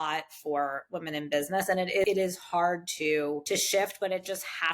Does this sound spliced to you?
yes; 2 cuts; at 2.0 s, 3.4 s

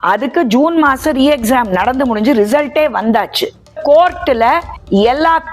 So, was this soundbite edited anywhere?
yes; 1 cut; at 3.8 s

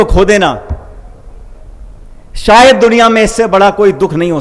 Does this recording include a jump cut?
no; 0 cuts

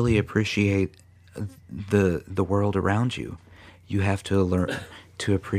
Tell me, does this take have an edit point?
no; 0 cuts

